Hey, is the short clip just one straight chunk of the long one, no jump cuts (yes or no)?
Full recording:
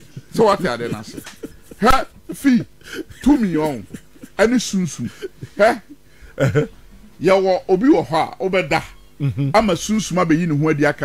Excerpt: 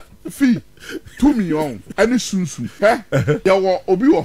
no